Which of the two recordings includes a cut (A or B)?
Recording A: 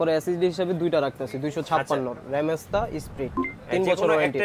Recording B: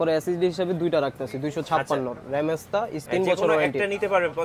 B